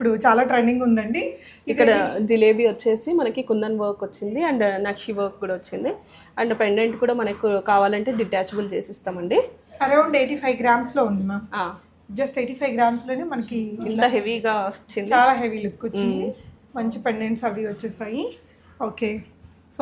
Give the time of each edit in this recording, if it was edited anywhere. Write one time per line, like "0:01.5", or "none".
none